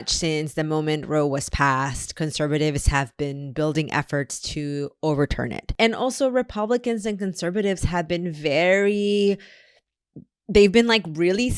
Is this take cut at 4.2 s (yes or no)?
no